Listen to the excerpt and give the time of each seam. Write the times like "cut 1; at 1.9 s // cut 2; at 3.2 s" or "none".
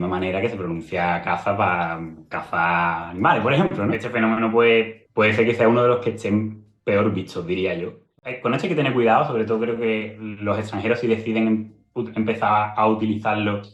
cut 1; at 4.0 s // cut 2; at 5.0 s // cut 3; at 8.2 s